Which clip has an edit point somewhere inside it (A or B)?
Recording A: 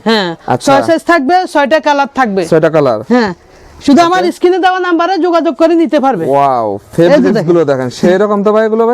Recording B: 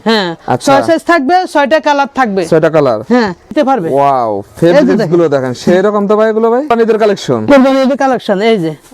B